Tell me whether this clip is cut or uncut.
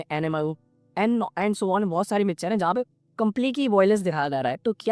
uncut